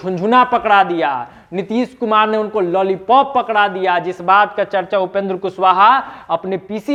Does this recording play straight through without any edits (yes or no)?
yes